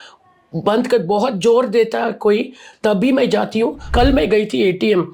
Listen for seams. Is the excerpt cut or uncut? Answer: cut